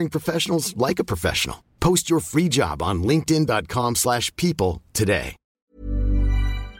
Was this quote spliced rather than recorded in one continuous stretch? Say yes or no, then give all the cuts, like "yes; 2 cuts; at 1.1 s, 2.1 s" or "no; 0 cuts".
yes; 1 cut; at 5.4 s